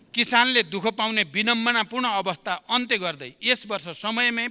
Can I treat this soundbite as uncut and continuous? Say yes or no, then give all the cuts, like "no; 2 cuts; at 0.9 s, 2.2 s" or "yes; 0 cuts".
yes; 0 cuts